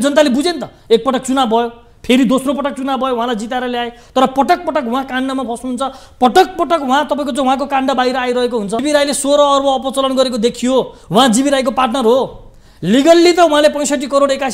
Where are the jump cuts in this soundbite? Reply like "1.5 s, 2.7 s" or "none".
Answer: 8.8 s